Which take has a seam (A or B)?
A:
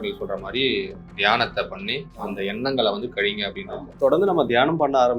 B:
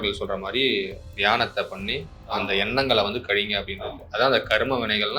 A